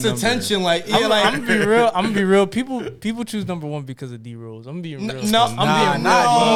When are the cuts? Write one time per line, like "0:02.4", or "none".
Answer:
none